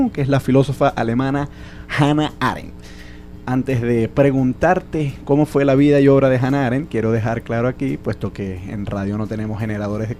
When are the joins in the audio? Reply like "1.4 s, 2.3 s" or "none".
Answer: 2.3 s